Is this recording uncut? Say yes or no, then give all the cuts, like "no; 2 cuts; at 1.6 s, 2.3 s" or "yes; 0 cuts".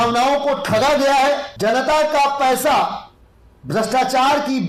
no; 1 cut; at 1.5 s